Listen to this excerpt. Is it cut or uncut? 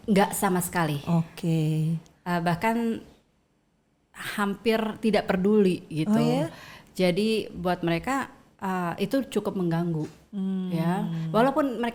uncut